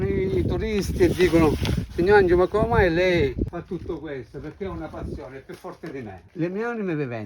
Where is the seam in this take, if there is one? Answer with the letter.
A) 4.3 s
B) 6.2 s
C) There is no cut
B